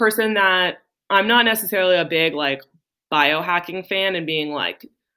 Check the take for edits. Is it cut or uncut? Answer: uncut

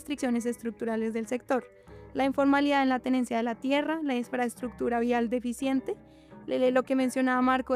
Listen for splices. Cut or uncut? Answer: uncut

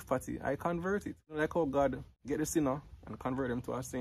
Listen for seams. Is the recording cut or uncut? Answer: cut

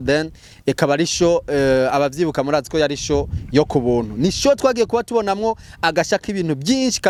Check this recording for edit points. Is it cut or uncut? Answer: uncut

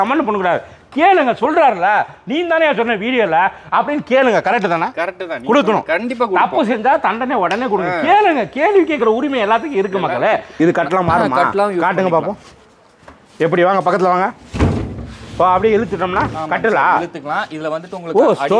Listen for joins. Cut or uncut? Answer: cut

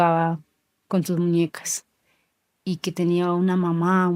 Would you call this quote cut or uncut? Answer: uncut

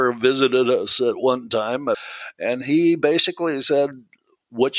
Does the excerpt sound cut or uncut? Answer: cut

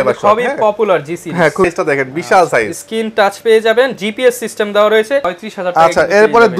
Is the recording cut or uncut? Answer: cut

